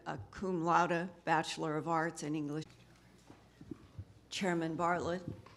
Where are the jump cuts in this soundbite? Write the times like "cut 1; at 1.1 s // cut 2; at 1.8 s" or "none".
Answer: none